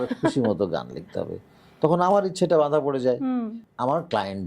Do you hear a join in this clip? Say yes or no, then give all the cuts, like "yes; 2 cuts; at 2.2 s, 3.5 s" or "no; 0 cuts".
yes; 1 cut; at 3.6 s